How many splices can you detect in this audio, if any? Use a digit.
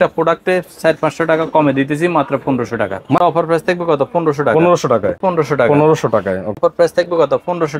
3